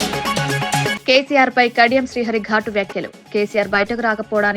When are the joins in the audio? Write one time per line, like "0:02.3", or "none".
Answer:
0:00.9